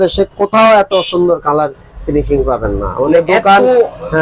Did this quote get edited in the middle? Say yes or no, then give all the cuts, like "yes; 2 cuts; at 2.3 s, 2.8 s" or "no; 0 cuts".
no; 0 cuts